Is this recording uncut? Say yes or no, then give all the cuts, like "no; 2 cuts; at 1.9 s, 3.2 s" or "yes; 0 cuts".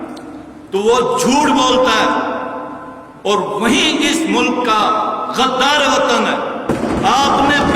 yes; 0 cuts